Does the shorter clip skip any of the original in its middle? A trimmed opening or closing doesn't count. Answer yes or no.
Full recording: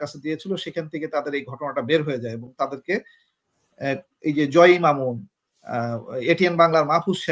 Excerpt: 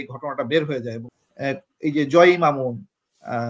yes